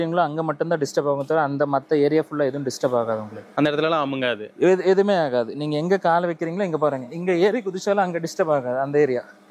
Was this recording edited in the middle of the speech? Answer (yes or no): no